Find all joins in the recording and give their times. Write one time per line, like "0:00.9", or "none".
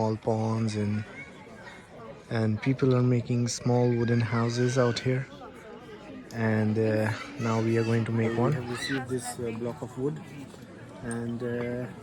none